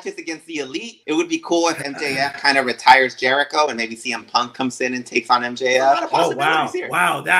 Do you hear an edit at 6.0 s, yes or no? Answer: yes